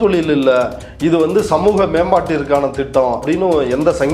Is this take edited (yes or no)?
yes